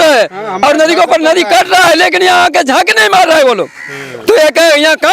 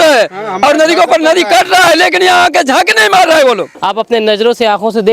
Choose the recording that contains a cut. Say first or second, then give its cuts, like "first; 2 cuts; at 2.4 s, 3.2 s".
second; 1 cut; at 3.8 s